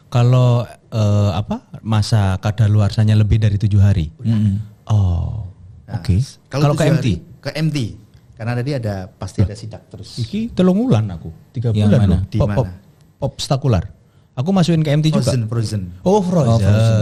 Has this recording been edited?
no; 0 cuts

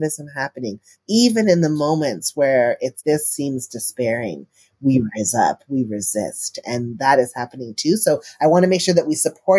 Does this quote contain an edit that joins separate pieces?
yes; 1 cut; at 0.9 s

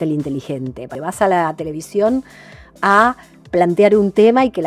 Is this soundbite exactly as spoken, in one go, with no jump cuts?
no; 1 cut; at 0.9 s

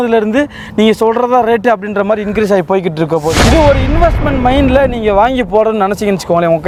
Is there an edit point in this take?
no; 0 cuts

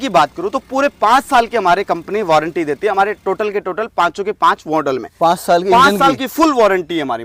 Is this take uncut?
yes; 0 cuts

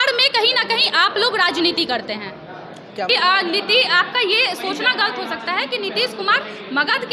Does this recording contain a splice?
yes; 1 cut; at 3.1 s

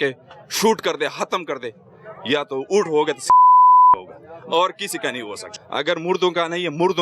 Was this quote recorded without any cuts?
no; 1 cut; at 5.4 s

